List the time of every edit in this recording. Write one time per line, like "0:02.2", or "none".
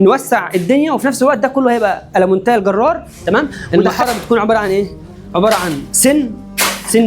0:03.6